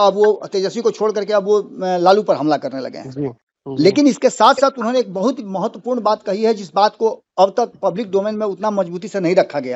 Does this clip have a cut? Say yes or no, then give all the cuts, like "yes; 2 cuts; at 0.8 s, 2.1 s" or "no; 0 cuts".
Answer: no; 0 cuts